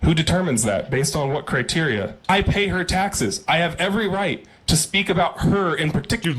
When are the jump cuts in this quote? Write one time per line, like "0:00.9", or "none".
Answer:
0:02.2